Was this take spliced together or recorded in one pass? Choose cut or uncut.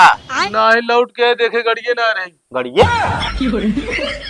cut